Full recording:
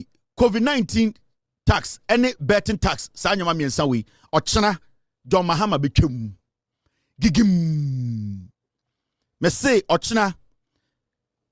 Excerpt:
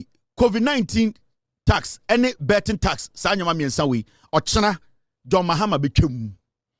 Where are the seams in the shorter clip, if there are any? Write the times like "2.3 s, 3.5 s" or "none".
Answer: none